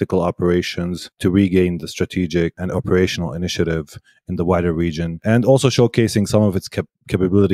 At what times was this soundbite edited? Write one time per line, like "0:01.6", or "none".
0:01.2
0:02.6
0:05.1